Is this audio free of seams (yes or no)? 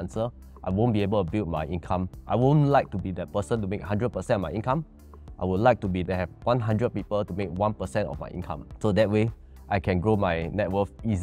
no